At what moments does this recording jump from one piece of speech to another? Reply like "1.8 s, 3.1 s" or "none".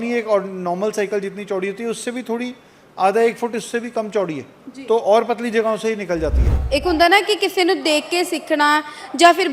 6.5 s